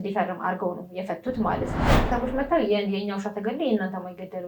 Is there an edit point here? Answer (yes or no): yes